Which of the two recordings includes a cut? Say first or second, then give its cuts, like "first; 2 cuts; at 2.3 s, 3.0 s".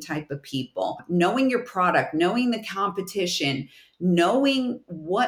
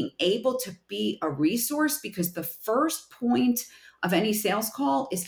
first; 1 cut; at 1.0 s